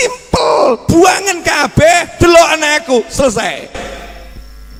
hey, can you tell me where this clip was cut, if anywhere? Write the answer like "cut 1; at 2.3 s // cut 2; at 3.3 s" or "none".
none